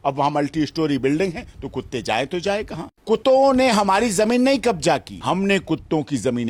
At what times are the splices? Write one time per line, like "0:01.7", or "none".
0:03.0
0:05.1